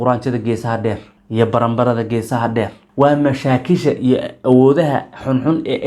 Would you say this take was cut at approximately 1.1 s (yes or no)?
yes